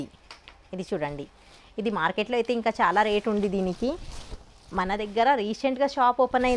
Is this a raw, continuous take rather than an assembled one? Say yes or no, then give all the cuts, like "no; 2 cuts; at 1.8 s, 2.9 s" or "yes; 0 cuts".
yes; 0 cuts